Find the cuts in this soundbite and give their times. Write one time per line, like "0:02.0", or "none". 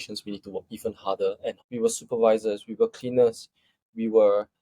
0:01.6